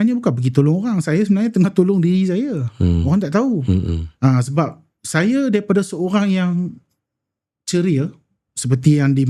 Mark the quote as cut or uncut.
uncut